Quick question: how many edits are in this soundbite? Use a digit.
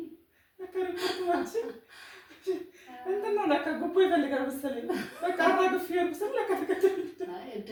0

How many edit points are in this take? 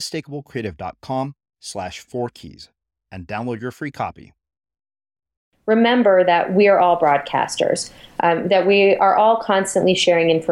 1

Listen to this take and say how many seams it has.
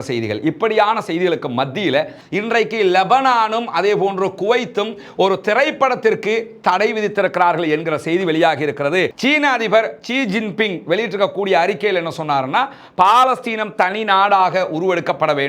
2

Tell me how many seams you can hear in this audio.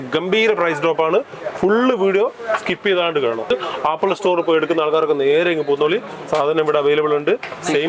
1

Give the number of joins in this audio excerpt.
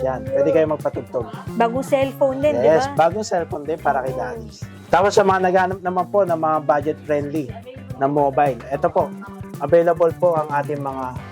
1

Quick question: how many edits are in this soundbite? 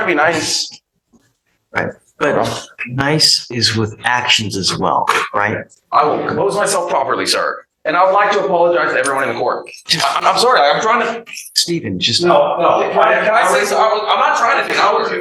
0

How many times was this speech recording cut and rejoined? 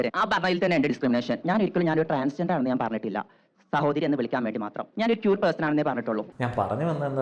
1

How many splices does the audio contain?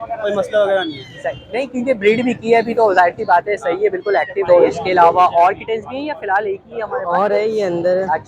1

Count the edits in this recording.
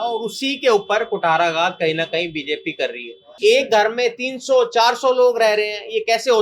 1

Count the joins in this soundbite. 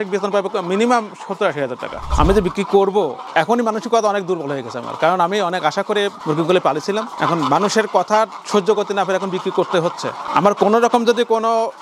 1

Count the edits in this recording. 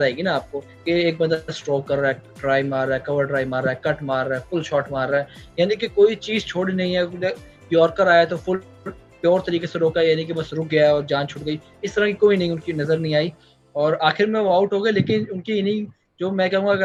0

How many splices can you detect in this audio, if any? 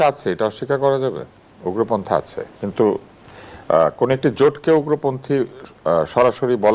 0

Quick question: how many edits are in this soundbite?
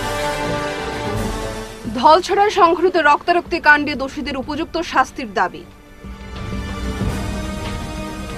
1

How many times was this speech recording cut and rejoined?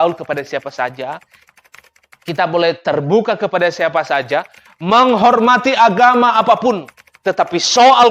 0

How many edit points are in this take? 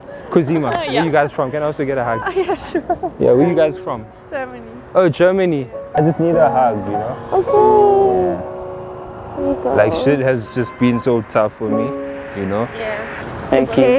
2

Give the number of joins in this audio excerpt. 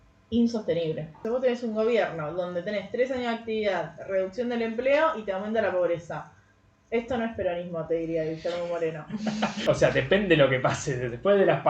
2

